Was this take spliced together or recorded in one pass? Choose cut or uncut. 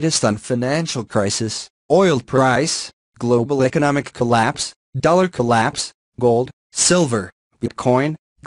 uncut